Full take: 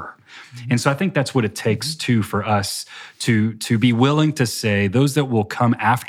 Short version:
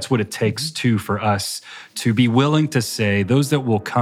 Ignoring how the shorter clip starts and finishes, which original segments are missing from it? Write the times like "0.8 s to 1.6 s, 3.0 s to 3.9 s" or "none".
3.2 s to 3.6 s

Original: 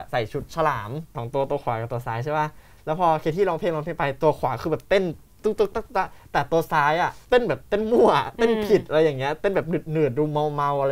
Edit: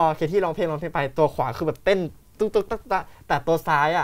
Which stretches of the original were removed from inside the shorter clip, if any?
none

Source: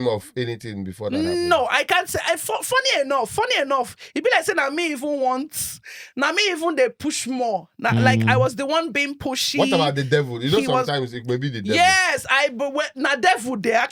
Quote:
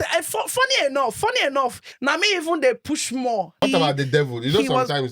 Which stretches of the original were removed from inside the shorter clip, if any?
4.0 s to 6.0 s, 7.8 s to 9.6 s

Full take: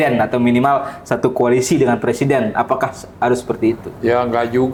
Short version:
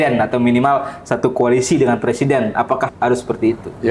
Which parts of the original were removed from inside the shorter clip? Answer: 2.9 s to 3.1 s

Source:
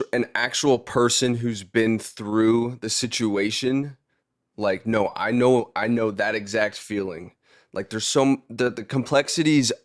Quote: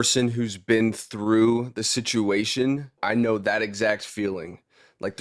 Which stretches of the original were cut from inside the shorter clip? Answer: 4.1 s to 5.7 s

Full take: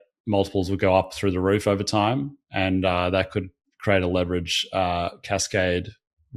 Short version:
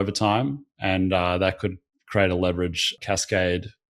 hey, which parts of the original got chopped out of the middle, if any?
4.6 s to 5.1 s

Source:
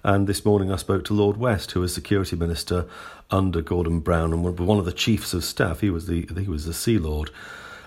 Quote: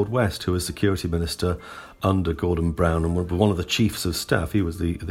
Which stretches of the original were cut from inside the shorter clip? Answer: none

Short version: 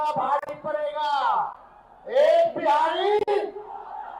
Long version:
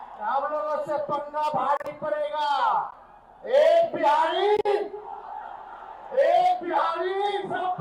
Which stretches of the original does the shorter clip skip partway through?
none

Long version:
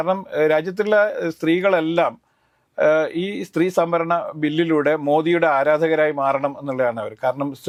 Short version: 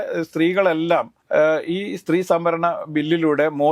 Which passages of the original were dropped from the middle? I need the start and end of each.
2.2 s to 2.6 s

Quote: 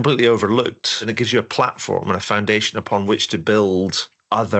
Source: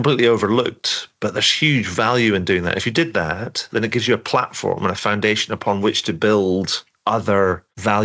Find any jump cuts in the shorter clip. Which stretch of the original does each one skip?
0.9 s to 3.7 s

